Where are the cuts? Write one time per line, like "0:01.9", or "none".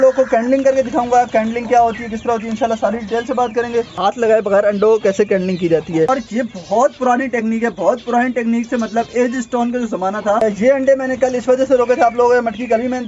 0:04.0
0:06.1
0:10.4